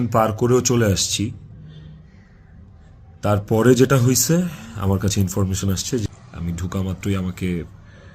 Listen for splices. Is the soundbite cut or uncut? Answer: cut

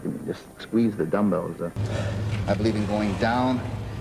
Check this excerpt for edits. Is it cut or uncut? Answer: cut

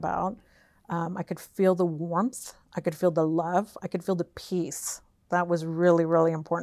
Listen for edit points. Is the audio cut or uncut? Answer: uncut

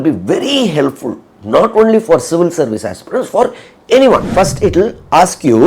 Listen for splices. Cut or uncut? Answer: cut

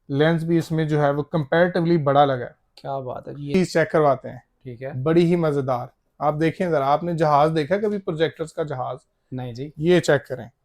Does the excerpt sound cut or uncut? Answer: cut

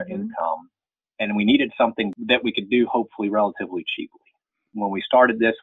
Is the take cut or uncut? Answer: cut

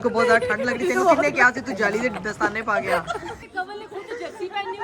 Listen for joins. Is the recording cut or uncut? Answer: cut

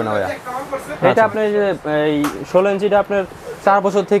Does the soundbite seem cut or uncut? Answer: uncut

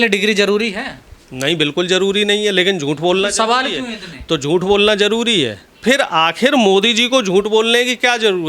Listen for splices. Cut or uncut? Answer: cut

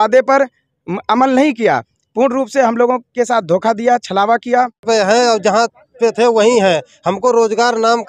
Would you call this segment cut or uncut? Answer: cut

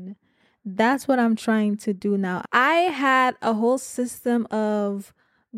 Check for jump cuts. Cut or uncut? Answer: cut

